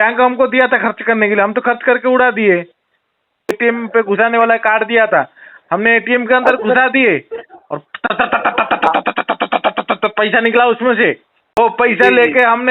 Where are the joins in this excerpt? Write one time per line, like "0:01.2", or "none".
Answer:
0:03.5
0:11.6